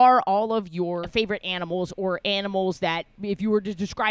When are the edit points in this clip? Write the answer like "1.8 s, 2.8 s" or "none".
1.1 s, 3.1 s